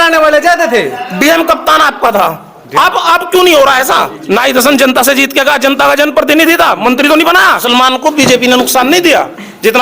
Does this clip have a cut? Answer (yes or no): yes